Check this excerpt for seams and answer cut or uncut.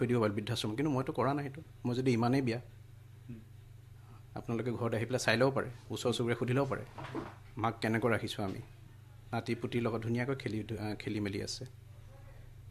uncut